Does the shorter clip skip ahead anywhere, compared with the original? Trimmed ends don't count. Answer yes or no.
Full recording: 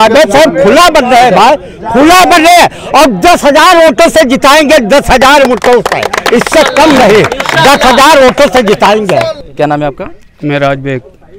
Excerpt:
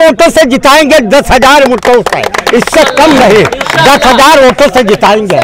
no